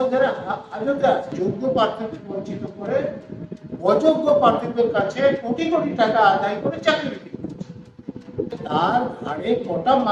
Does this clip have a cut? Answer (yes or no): yes